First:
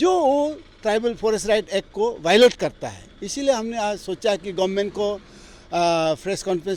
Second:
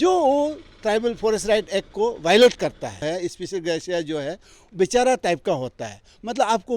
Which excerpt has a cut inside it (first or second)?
second